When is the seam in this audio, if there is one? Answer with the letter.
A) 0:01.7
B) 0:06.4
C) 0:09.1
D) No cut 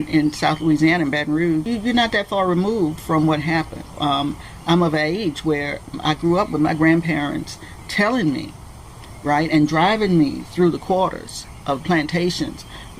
A